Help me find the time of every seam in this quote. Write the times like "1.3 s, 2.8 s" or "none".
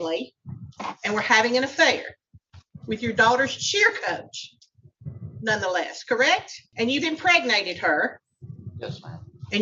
6.6 s